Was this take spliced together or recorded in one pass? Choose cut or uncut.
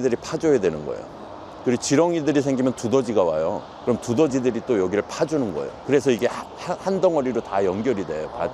uncut